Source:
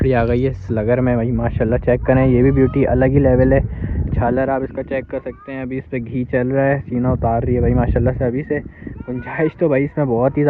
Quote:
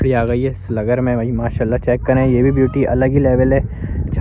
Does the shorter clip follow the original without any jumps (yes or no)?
yes